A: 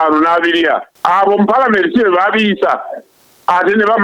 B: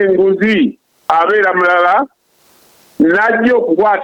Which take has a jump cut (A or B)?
A